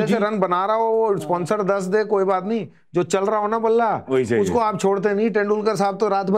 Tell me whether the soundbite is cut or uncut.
uncut